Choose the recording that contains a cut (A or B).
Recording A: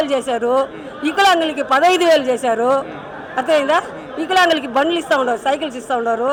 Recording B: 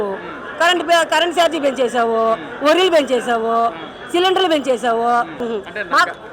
B